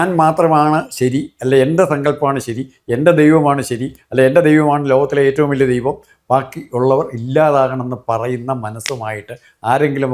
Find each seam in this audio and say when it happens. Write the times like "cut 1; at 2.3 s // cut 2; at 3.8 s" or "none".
none